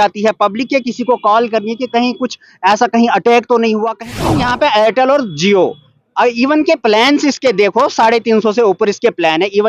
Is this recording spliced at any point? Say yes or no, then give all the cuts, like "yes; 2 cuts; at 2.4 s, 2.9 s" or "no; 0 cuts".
yes; 1 cut; at 4.3 s